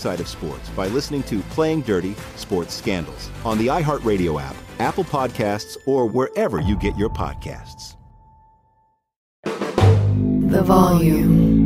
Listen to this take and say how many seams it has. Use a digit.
1